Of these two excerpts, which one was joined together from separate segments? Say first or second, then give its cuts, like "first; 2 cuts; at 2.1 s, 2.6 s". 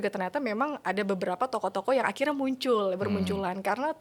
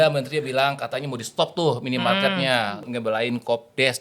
second; 1 cut; at 2.9 s